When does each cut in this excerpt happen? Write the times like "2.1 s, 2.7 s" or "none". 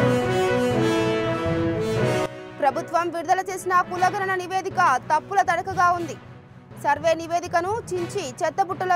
2.4 s